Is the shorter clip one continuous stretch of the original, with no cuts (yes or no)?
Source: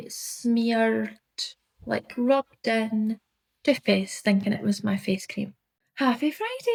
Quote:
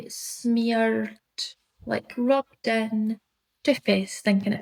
yes